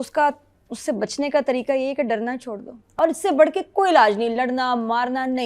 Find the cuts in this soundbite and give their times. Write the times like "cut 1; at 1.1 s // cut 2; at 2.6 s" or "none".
cut 1; at 2.8 s